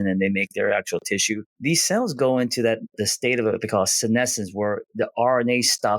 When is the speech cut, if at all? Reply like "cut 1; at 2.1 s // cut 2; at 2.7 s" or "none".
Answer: cut 1; at 1.5 s // cut 2; at 2.9 s